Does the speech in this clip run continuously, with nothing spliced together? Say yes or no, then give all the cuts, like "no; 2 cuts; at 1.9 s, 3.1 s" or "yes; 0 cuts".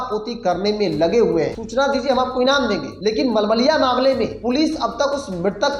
no; 3 cuts; at 1.6 s, 2.9 s, 4.4 s